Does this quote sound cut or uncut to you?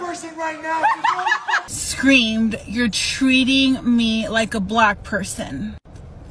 cut